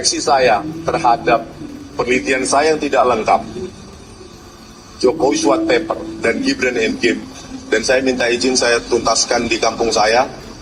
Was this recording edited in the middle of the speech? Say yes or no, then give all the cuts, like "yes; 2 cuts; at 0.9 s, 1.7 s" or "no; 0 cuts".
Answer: no; 0 cuts